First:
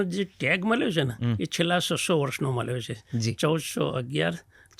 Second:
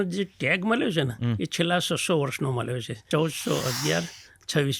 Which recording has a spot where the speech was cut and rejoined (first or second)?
second